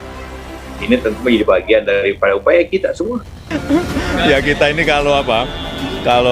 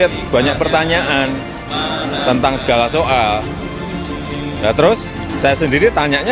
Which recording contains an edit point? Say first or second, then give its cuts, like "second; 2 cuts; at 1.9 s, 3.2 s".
first; 1 cut; at 3.4 s